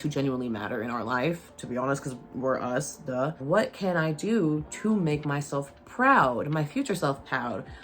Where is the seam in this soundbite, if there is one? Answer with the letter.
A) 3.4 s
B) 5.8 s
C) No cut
A